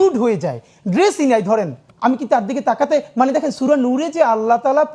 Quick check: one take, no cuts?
no; 1 cut; at 1.8 s

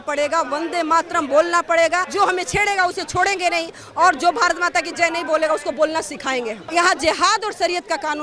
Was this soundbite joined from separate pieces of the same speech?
yes; 2 cuts; at 2.1 s, 6.6 s

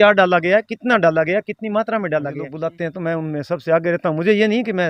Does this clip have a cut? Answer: yes; 1 cut; at 2.5 s

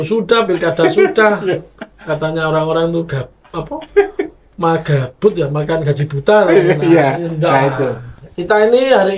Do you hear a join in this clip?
no; 0 cuts

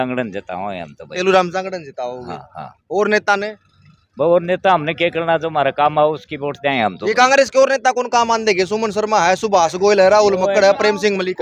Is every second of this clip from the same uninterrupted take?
yes; 0 cuts

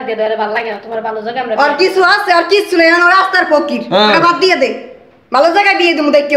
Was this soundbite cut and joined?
no; 0 cuts

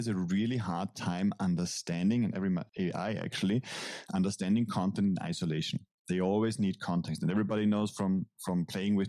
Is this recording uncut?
yes; 0 cuts

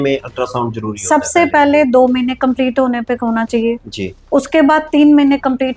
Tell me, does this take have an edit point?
no; 0 cuts

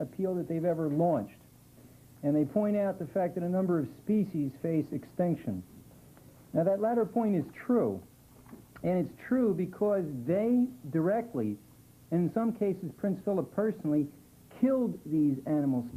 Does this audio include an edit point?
no; 0 cuts

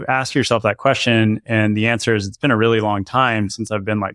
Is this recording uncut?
yes; 0 cuts

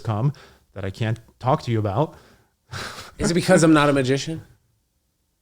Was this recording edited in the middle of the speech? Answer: no; 0 cuts

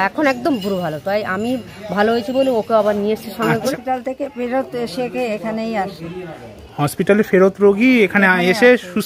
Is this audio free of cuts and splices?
no; 1 cut; at 3.7 s

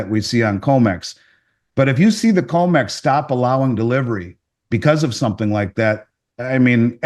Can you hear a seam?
no; 0 cuts

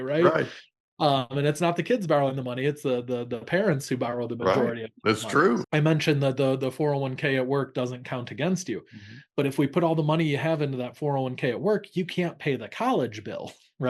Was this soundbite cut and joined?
yes; 1 cut; at 5.7 s

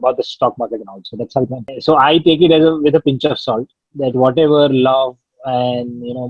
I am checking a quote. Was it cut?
yes; 1 cut; at 1.7 s

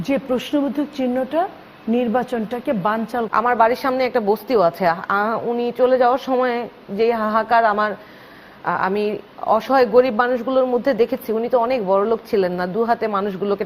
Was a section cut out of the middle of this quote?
yes; 1 cut; at 3.3 s

